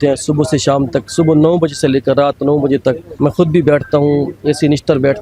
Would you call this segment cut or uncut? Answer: cut